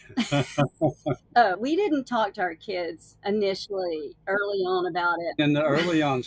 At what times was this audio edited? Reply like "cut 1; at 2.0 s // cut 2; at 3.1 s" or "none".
cut 1; at 1.6 s // cut 2; at 5.0 s